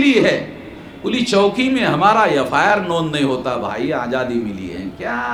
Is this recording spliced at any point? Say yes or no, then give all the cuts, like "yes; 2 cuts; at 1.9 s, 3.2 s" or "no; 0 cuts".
no; 0 cuts